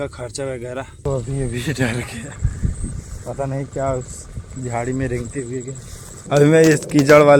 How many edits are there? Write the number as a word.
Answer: two